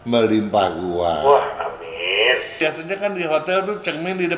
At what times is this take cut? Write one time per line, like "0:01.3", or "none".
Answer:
0:02.6